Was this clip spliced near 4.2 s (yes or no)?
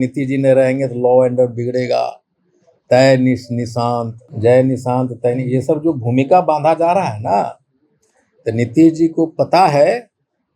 yes